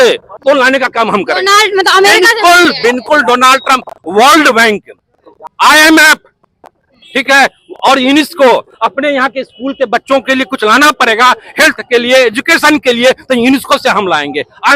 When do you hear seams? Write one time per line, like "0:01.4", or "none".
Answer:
none